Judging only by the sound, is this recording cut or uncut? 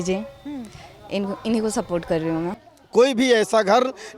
cut